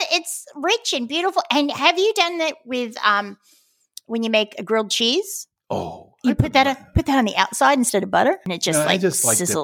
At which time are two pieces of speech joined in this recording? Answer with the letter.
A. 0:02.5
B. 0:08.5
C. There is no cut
B